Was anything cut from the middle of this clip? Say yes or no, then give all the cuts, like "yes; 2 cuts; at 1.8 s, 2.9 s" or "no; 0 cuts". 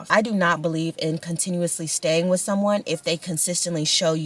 no; 0 cuts